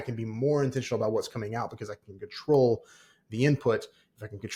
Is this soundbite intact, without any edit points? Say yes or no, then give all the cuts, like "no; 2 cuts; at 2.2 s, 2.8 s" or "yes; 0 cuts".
yes; 0 cuts